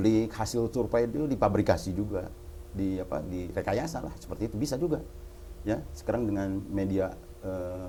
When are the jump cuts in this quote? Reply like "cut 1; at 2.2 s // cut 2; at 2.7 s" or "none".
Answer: none